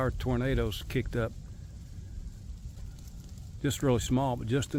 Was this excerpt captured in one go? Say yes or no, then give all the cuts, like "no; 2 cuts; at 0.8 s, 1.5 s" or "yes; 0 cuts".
yes; 0 cuts